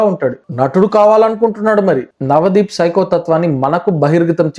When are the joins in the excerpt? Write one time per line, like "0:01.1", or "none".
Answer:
0:02.1